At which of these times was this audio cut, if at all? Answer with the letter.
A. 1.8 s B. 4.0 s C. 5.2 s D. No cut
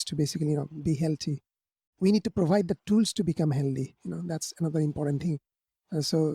A